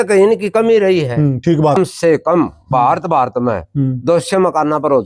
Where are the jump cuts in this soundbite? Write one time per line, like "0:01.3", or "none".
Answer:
0:01.8

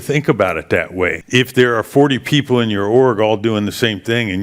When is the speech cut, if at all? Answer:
0:01.2

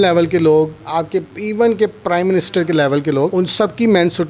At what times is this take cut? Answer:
0:03.3

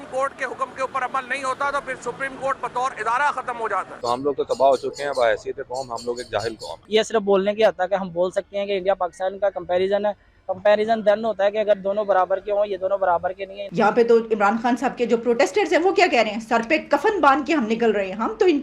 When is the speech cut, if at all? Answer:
0:04.0
0:06.7
0:13.6

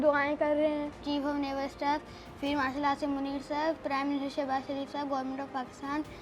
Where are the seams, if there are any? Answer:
0:00.9

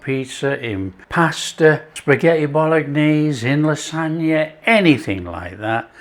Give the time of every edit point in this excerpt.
0:01.0
0:01.9

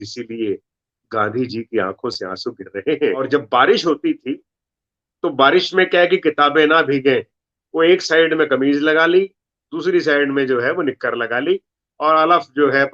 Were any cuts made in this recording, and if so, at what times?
0:03.0

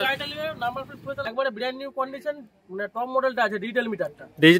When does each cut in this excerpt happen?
0:01.3

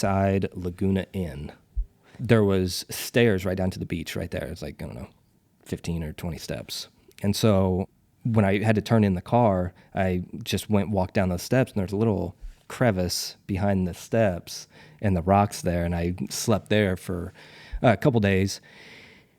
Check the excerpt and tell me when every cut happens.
0:02.2
0:07.9

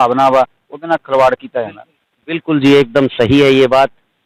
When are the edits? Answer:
none

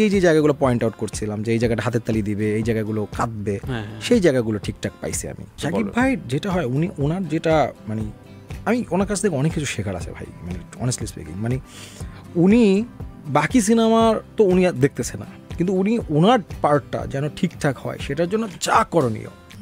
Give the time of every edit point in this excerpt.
0:05.6

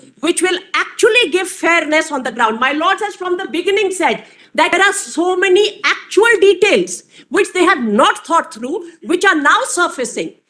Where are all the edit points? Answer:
0:04.7

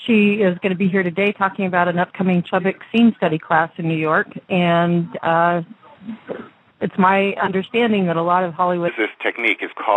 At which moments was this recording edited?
none

